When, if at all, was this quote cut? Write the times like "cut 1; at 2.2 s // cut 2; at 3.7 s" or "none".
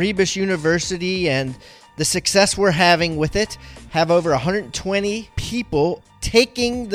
none